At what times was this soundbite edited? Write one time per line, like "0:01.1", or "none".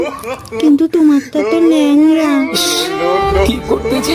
0:02.7

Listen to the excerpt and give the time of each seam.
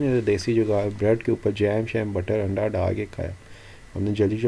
none

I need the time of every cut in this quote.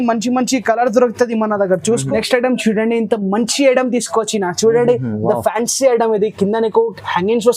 0:02.1

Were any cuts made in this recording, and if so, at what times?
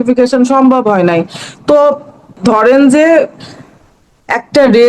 0:02.3

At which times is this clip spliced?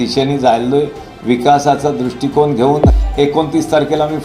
0:02.9

